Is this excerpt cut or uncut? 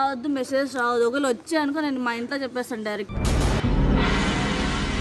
cut